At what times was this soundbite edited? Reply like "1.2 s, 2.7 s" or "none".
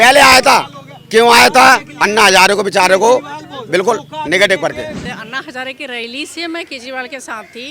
5.1 s